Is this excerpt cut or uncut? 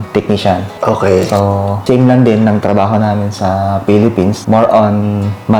cut